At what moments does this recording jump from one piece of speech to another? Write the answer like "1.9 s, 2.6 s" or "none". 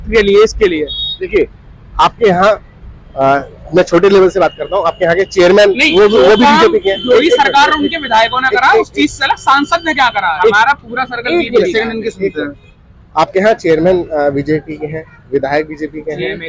none